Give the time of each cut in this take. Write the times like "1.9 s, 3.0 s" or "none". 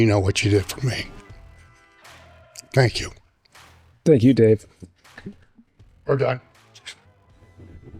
none